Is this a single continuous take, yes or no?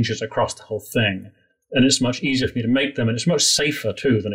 yes